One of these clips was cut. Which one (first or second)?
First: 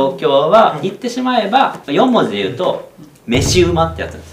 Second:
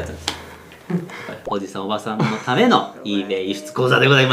second